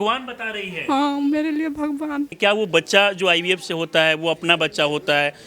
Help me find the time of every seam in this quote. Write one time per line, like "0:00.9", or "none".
0:02.3